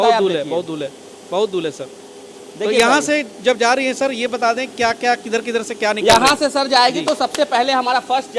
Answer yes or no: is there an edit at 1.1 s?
no